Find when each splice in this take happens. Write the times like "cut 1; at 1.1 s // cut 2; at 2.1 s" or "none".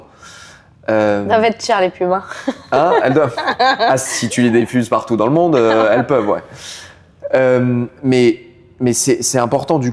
none